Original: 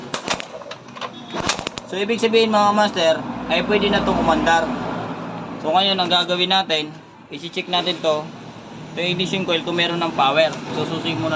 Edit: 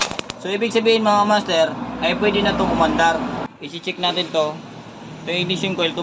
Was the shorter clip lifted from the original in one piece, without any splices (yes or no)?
no